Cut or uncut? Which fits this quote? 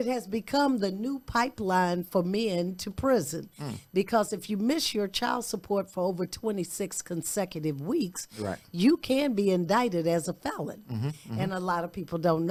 uncut